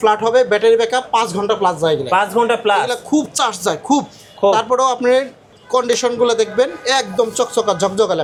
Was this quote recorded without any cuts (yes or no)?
yes